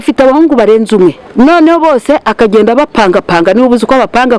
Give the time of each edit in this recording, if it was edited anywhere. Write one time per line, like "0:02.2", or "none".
0:01.2